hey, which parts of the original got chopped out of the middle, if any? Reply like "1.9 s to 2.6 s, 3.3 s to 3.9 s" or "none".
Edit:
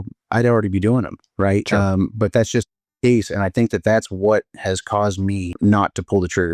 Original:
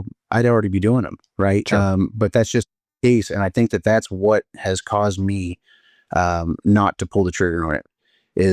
5.6 s to 6.6 s